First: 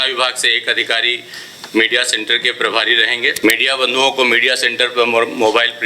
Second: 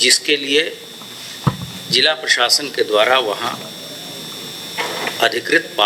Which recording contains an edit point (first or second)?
first